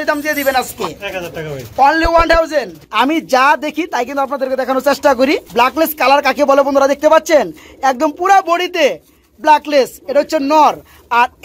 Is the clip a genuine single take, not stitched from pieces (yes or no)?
no